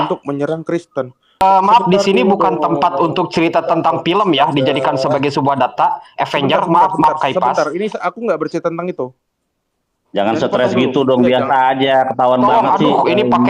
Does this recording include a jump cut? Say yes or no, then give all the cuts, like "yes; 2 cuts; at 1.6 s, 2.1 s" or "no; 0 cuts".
yes; 1 cut; at 1.4 s